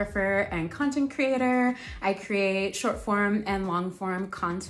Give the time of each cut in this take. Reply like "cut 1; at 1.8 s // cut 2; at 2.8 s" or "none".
none

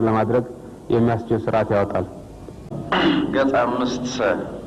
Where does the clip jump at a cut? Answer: cut 1; at 2.8 s

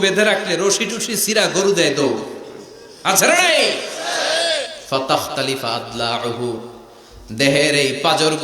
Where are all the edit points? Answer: cut 1; at 4.8 s

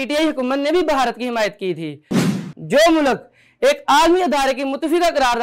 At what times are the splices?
cut 1; at 2.2 s

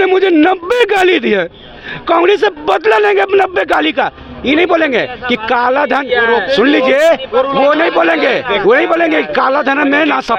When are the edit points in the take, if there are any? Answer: none

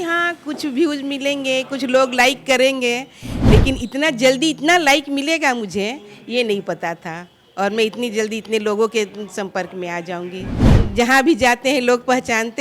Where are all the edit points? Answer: cut 1; at 10.8 s

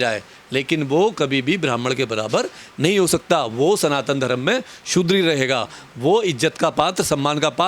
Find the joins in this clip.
none

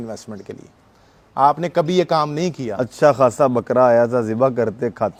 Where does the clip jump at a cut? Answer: none

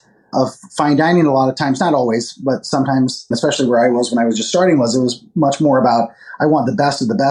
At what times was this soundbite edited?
none

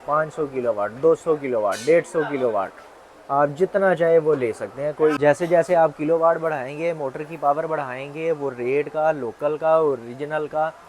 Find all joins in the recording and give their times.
cut 1; at 5.2 s

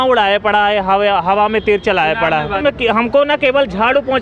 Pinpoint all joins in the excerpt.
cut 1; at 2.6 s

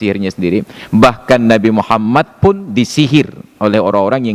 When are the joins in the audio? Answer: none

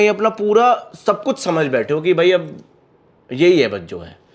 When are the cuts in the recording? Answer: none

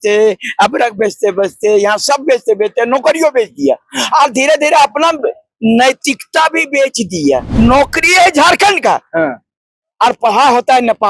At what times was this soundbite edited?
cut 1; at 7.5 s

